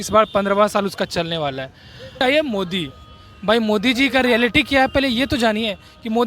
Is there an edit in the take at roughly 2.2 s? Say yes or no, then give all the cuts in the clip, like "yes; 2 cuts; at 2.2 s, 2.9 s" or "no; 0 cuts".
yes; 1 cut; at 2.2 s